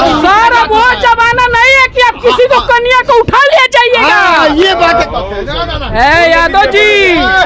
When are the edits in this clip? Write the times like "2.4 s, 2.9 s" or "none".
4.9 s